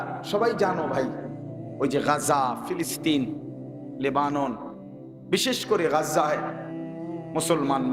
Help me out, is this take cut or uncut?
uncut